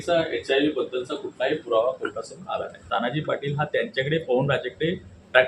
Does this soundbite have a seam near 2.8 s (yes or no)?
yes